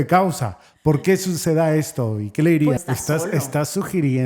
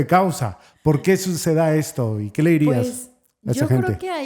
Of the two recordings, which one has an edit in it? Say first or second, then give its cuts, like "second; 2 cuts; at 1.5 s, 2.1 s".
first; 1 cut; at 2.8 s